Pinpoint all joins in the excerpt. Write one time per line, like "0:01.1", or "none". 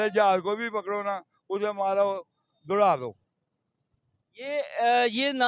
none